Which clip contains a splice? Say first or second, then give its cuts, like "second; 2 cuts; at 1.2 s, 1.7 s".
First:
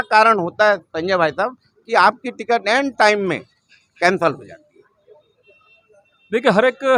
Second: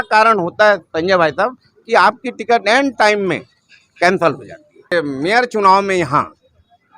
second; 1 cut; at 4.9 s